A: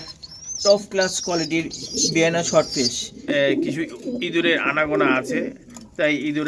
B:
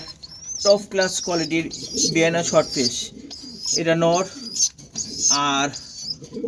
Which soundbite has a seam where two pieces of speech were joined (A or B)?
A